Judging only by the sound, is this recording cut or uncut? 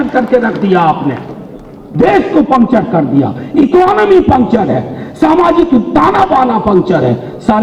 uncut